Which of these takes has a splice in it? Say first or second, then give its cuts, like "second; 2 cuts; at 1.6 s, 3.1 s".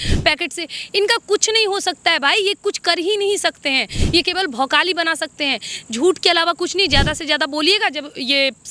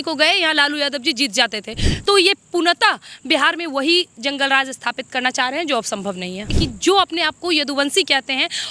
second; 1 cut; at 6.5 s